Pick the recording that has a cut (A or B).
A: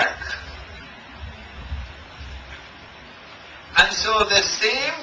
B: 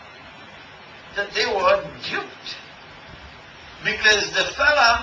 B